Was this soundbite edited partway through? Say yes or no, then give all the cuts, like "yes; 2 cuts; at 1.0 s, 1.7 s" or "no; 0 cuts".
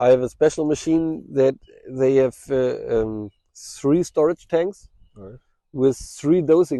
no; 0 cuts